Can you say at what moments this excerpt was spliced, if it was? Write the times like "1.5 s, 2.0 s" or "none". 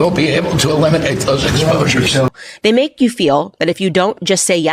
2.3 s